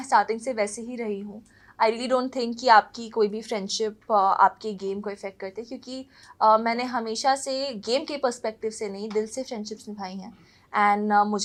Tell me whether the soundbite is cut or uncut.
uncut